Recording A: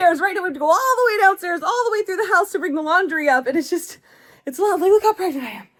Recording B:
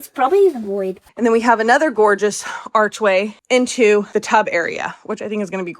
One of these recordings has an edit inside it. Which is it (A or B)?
B